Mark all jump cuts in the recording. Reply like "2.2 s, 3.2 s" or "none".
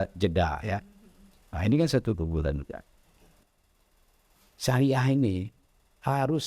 3.3 s